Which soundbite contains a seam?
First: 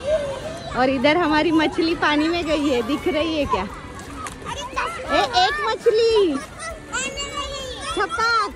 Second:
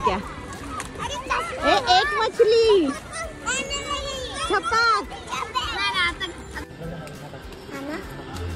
second; 1 cut; at 6.6 s

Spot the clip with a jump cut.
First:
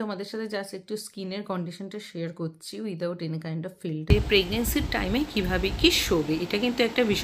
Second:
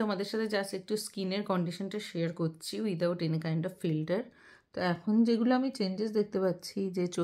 first; 1 cut; at 4.1 s

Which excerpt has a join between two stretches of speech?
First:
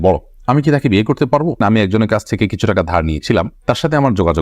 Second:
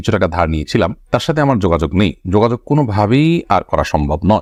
first; 1 cut; at 1.5 s

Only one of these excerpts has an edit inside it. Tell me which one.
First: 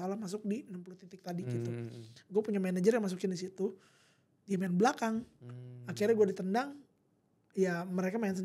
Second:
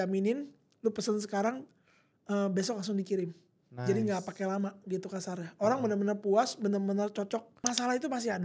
second; 1 cut; at 7.5 s

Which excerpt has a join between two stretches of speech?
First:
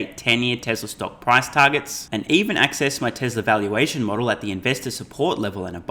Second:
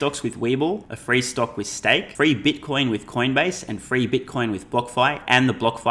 second; 2 cuts; at 0.9 s, 2.1 s

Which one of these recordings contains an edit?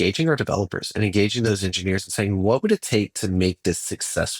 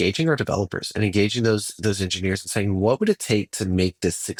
first; 1 cut; at 1.5 s

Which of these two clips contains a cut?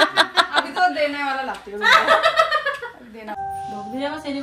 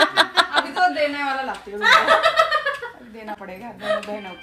first; 1 cut; at 3.4 s

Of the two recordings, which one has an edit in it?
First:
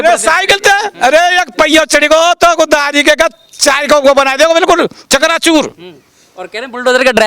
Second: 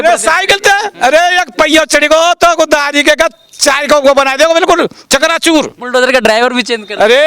second; 1 cut; at 5.8 s

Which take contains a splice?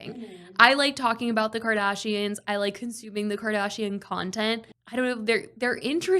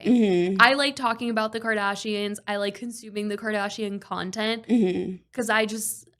first; 1 cut; at 4.6 s

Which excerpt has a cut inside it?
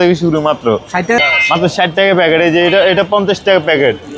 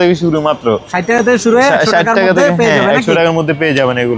first; 1 cut; at 1.1 s

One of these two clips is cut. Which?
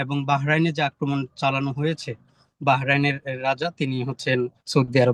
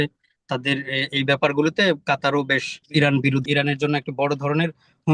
second; 2 cuts; at 2.7 s, 3.4 s

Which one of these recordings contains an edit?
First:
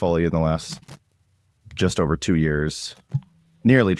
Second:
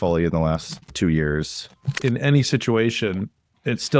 second; 2 cuts; at 0.9 s, 1.9 s

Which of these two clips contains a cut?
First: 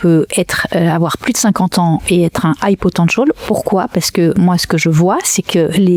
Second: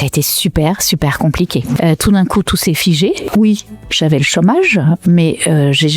second; 2 cuts; at 1.8 s, 3.2 s

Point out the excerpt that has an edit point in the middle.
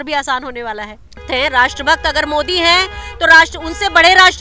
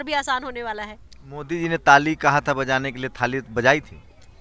first; 1 cut; at 1.2 s

